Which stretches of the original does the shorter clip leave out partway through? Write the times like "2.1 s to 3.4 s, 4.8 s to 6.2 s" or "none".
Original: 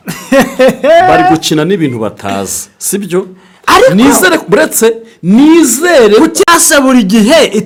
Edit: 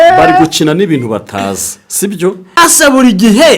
3.5 s to 6.5 s